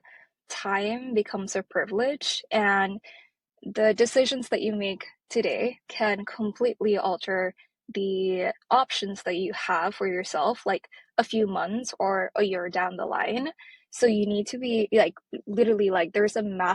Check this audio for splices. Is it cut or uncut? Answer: uncut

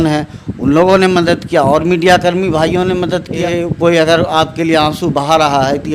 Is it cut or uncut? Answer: cut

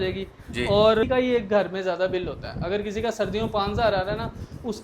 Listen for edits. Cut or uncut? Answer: cut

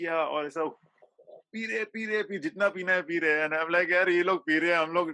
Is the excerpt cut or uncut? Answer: uncut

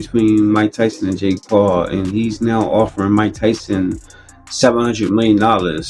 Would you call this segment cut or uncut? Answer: uncut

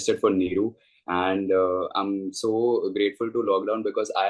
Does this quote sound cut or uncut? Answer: uncut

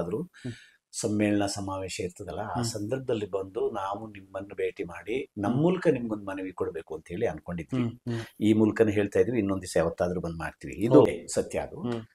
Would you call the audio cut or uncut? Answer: cut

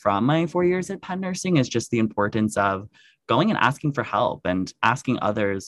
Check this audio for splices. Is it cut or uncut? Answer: uncut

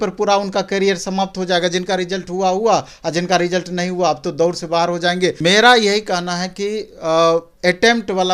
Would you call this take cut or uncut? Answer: cut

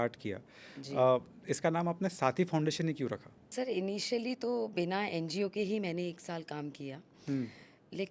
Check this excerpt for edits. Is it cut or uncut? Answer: cut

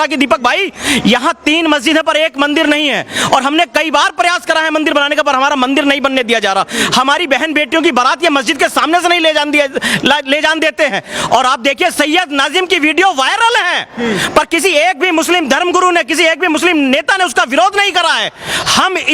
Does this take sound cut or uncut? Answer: uncut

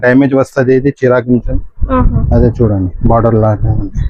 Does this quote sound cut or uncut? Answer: uncut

